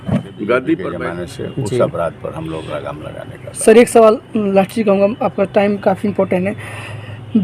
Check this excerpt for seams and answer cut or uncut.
cut